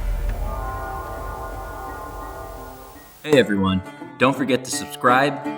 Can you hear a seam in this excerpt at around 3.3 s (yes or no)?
yes